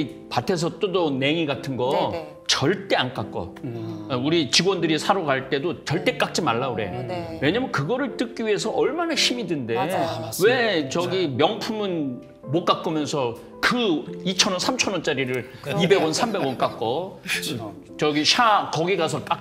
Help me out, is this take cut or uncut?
uncut